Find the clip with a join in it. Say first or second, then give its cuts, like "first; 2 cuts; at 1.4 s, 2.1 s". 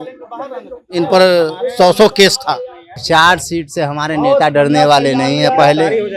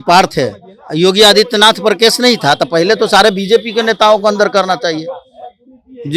first; 1 cut; at 3.0 s